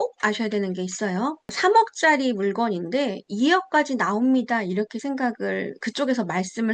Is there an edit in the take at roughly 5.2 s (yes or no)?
no